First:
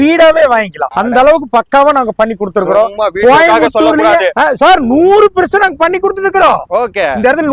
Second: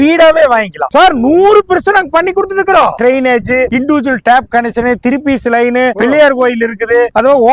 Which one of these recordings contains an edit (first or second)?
second